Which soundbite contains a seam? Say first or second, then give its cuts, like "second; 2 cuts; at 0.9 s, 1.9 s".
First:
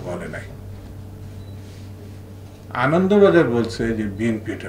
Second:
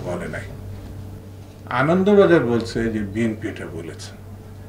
second; 1 cut; at 1.2 s